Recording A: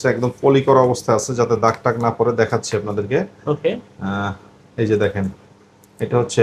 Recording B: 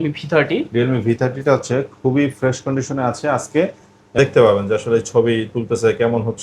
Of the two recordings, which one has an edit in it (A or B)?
B